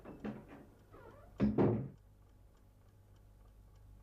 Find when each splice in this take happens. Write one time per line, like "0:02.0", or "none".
0:03.1